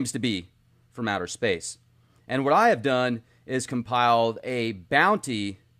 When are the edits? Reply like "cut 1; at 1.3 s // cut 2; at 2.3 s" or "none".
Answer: none